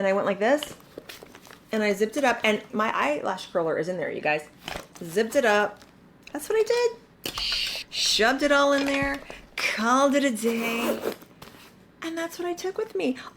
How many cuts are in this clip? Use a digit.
1